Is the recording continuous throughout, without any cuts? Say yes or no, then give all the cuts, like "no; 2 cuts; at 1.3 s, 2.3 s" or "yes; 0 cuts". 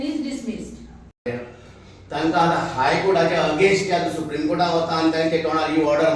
no; 1 cut; at 1.2 s